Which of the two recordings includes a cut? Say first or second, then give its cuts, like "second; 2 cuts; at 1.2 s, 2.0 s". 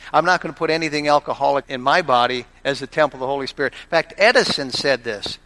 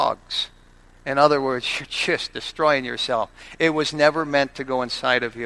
first; 1 cut; at 1.7 s